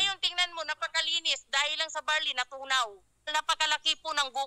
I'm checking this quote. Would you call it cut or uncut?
cut